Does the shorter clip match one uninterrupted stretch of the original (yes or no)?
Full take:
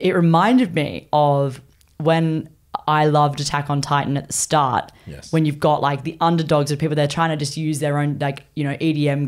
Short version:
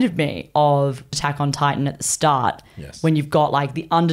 no